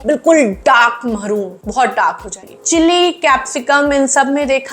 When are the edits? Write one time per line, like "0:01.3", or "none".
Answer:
0:02.4